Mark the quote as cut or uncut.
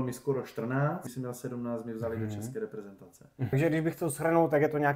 cut